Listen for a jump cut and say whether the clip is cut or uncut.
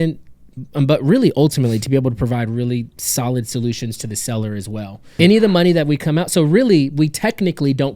cut